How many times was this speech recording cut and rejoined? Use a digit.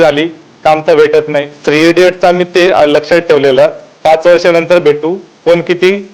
1